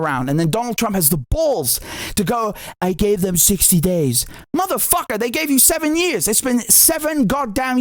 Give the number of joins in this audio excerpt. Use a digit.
0